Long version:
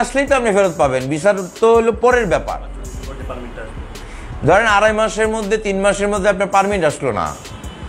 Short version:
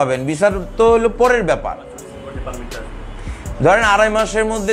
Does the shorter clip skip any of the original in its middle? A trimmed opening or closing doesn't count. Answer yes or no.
no